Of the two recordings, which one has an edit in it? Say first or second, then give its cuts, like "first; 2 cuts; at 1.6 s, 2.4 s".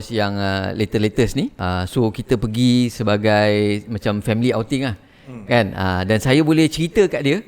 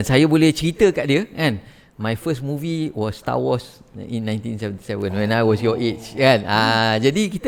first; 1 cut; at 1.6 s